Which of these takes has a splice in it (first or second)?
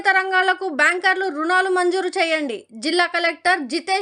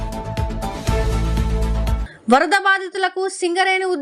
second